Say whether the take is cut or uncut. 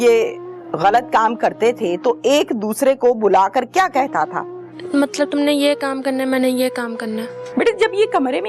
cut